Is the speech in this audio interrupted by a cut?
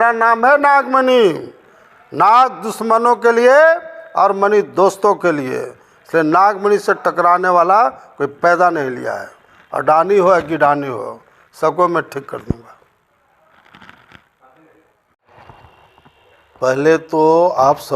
yes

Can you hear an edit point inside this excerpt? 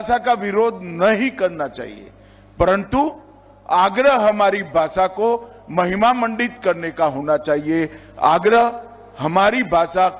no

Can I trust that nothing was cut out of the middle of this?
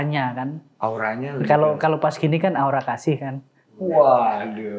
yes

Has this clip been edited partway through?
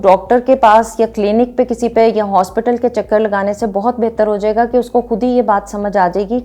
no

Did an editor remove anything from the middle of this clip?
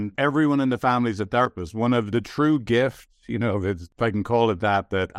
yes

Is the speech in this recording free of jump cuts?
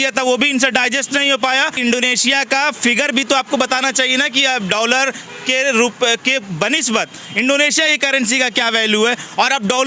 no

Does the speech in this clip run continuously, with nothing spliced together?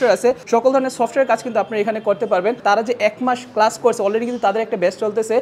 no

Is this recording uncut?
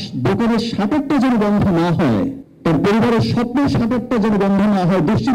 no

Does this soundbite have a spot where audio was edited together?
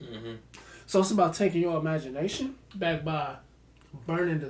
yes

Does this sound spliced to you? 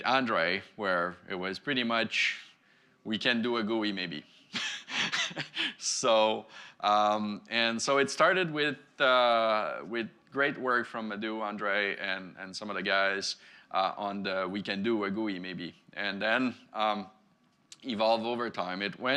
no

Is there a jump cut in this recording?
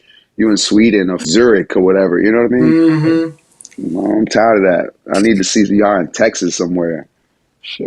yes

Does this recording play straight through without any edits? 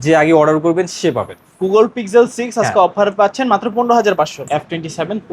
no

